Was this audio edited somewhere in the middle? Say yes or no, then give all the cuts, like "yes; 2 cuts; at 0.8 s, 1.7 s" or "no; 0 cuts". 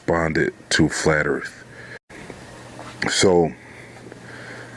yes; 1 cut; at 3.4 s